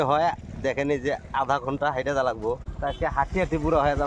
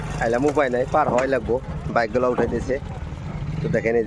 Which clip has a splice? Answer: first; 1 cut; at 2.7 s

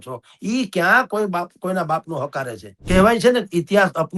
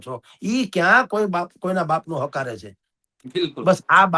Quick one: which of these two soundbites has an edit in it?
first; 1 cut; at 2.8 s

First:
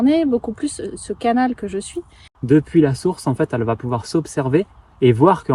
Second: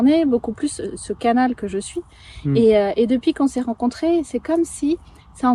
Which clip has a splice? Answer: first; 1 cut; at 2.3 s

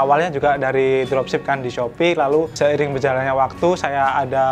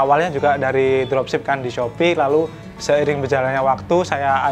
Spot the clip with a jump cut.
first; 1 cut; at 2.5 s

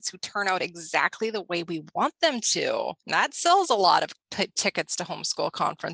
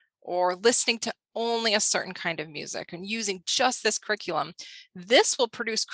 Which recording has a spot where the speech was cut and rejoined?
first; 2 cuts; at 3.0 s, 4.2 s

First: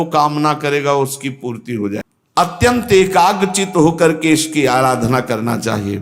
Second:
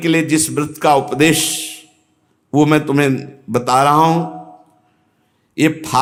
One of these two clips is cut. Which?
first; 1 cut; at 2.2 s

